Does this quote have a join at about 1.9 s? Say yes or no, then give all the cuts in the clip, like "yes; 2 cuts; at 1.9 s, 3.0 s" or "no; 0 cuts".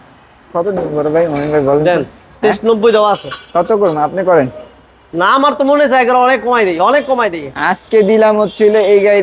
no; 0 cuts